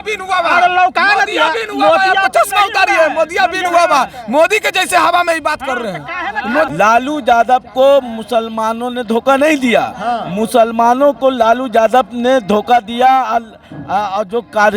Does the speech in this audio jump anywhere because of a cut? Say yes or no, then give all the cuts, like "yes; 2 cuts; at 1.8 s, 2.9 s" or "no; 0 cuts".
yes; 1 cut; at 6.7 s